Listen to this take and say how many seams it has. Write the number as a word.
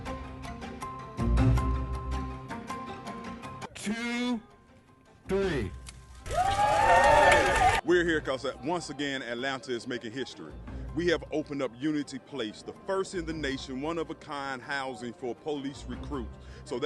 zero